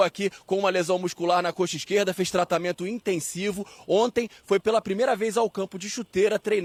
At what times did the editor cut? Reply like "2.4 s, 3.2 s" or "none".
none